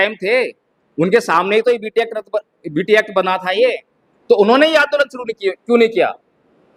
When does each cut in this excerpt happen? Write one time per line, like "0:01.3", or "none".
none